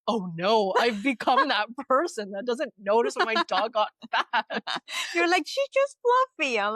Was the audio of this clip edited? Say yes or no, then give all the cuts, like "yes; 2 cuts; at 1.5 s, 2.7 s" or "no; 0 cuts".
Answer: no; 0 cuts